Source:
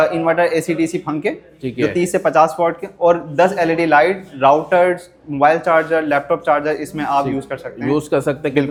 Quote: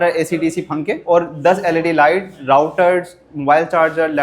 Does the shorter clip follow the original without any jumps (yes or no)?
no